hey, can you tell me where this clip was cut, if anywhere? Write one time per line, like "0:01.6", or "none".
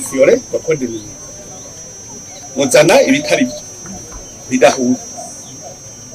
0:02.8